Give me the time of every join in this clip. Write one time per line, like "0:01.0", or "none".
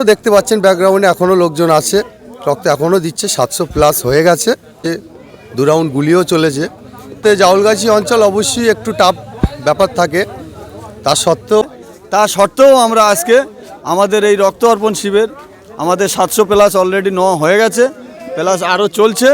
0:04.8
0:07.2
0:11.6